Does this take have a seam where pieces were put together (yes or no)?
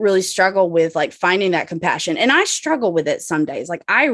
no